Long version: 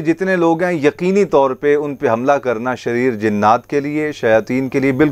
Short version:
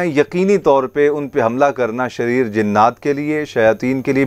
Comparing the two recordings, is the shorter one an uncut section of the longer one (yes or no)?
yes